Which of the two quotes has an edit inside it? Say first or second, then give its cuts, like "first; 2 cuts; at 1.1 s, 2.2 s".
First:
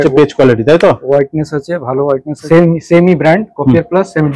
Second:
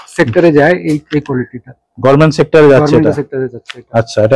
first; 1 cut; at 2.3 s